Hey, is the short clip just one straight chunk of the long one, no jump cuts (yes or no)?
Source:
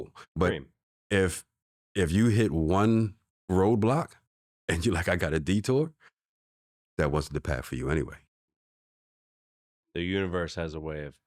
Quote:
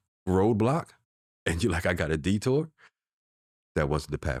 yes